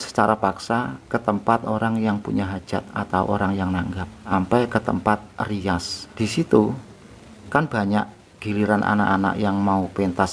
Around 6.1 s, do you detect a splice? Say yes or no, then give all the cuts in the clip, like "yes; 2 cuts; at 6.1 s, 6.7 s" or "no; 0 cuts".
yes; 2 cuts; at 4.3 s, 6.1 s